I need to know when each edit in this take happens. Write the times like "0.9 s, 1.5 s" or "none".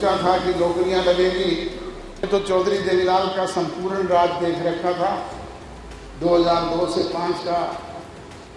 2.3 s

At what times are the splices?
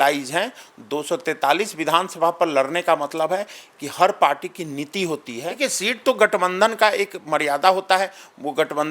5.6 s

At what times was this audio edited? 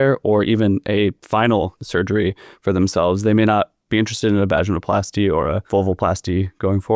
1.2 s, 1.8 s, 5.6 s

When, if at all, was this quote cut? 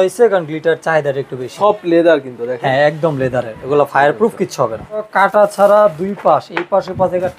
1.5 s, 5.1 s

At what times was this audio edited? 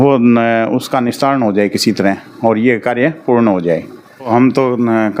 4.3 s

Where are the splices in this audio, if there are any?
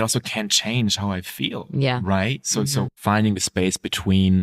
2.9 s

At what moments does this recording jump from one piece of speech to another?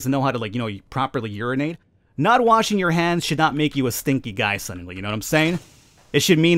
1.9 s

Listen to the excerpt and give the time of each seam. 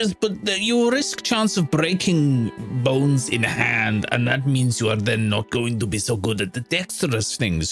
none

